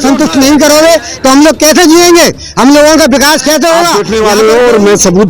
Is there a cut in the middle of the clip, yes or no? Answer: yes